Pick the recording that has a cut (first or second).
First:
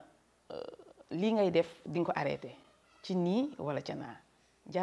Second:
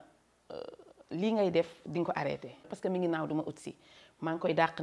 second